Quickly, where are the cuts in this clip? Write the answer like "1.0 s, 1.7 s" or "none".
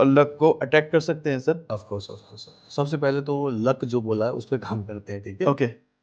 1.6 s